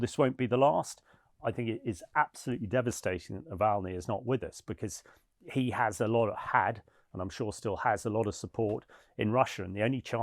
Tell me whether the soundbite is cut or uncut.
uncut